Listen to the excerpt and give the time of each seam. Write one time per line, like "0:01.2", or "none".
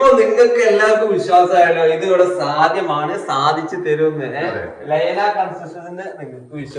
none